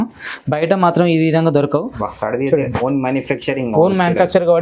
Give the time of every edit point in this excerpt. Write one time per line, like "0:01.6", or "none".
0:02.0